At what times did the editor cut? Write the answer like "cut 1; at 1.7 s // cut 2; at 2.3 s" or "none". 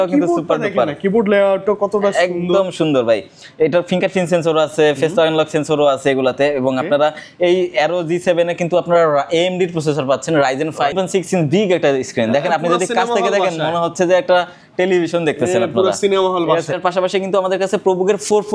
cut 1; at 10.9 s // cut 2; at 16.8 s

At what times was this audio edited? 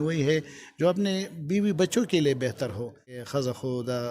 cut 1; at 3.2 s

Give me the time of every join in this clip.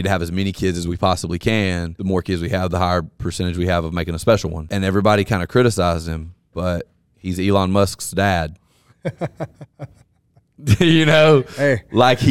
cut 1; at 1.9 s // cut 2; at 4.6 s

